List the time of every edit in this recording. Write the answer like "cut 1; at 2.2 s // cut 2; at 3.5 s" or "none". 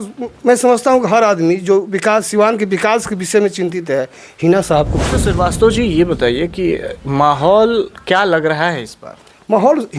cut 1; at 5.2 s